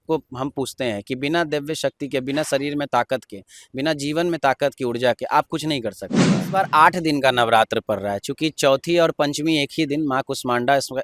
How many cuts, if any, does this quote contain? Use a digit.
1